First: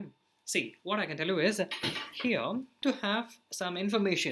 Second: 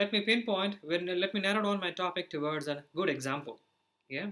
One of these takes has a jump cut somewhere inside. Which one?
first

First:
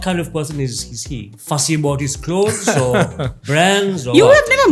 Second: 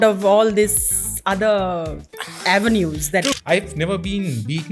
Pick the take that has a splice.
second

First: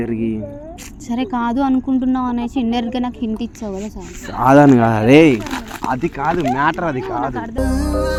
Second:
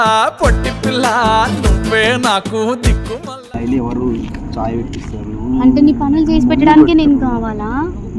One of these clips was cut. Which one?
second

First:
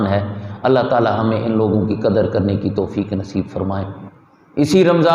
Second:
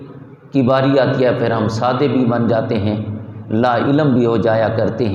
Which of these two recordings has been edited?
first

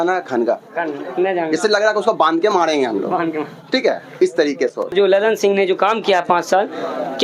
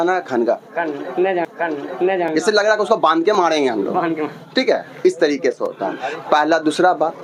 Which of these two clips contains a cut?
first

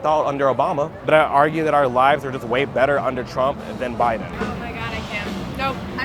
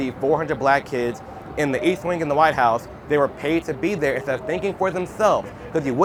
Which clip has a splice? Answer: first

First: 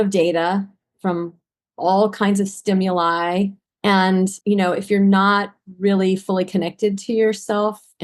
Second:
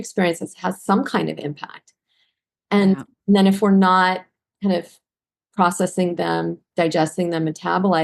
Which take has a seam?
first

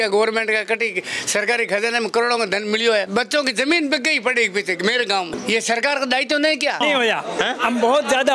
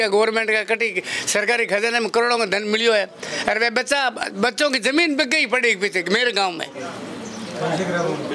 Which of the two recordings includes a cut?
first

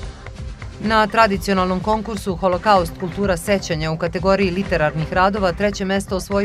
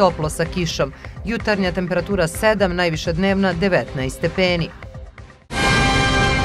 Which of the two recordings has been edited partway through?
second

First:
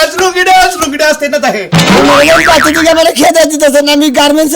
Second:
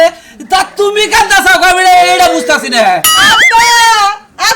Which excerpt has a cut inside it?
first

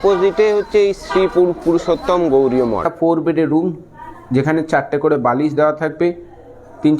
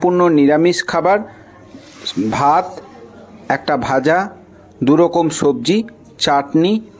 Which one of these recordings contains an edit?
first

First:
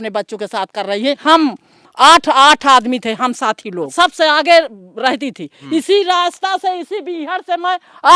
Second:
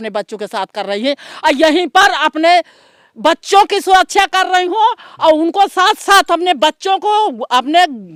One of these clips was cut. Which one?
first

